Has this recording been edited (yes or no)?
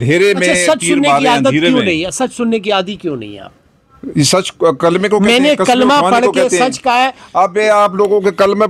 no